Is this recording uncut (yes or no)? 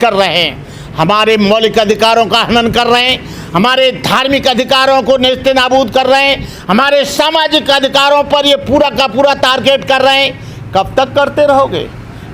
yes